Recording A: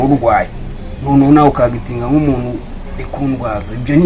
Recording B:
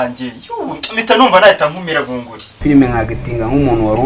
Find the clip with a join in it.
B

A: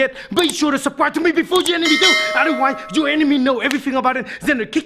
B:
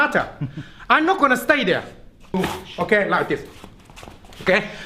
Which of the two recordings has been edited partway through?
B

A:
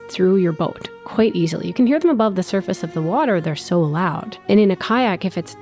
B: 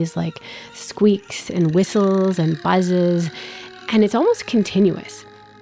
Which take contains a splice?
A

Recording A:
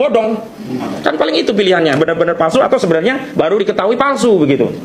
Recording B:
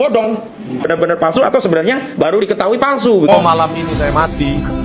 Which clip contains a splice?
B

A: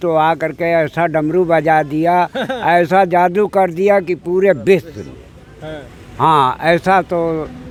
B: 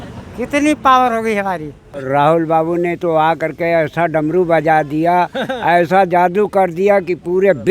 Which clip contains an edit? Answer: B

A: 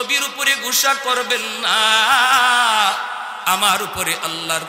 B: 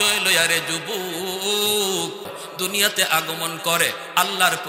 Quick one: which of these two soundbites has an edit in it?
B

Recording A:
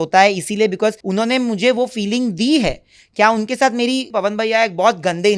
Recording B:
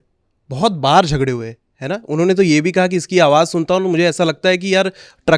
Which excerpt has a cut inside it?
A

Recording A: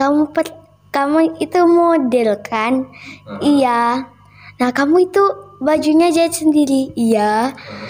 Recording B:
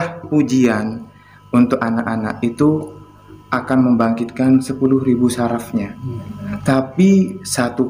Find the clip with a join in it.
B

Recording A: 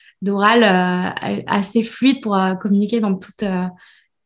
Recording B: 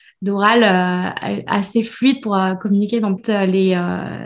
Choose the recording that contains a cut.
B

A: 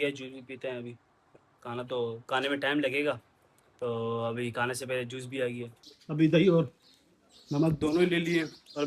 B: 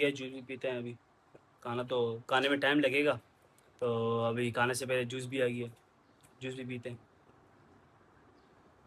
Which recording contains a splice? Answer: A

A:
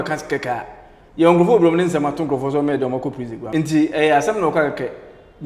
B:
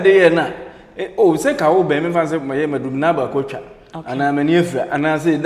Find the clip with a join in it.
A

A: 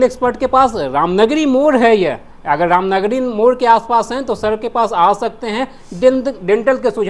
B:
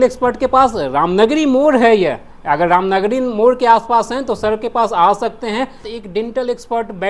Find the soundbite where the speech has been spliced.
B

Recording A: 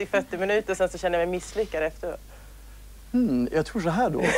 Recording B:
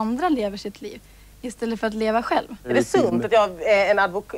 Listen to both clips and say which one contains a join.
B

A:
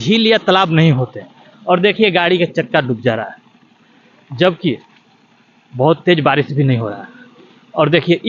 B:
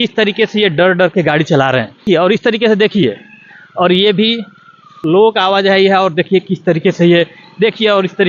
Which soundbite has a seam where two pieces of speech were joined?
B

